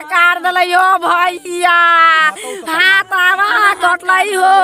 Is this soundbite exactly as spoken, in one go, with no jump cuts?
yes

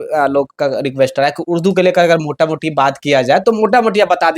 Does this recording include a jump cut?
no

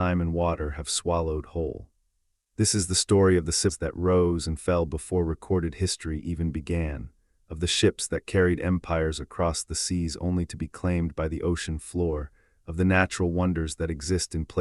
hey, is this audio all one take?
no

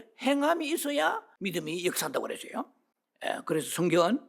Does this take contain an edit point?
yes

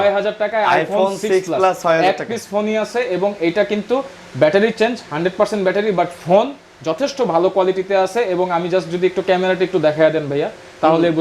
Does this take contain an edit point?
no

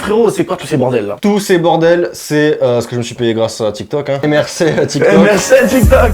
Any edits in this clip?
yes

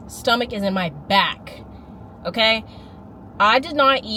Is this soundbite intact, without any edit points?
yes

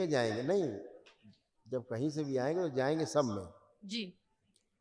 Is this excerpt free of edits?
yes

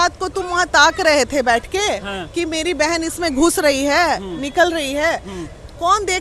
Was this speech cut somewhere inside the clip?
no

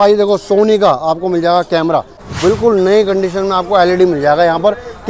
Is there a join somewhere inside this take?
yes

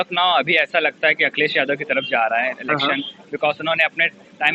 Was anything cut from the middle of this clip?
no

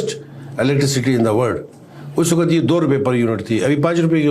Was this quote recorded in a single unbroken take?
yes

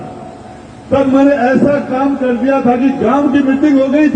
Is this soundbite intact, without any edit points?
yes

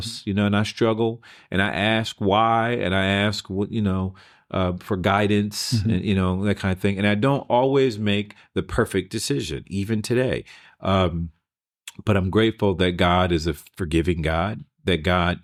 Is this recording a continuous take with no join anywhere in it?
yes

